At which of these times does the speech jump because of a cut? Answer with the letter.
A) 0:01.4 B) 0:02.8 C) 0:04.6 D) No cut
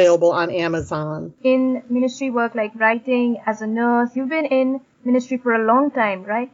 D